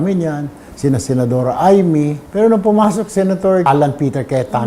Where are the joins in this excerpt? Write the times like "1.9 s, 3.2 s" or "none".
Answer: 2.2 s, 3.7 s